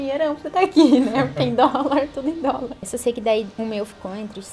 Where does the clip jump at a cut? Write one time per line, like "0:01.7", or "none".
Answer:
0:02.9
0:03.5